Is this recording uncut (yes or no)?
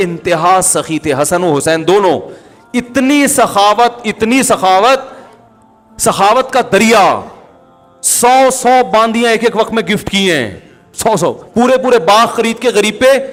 yes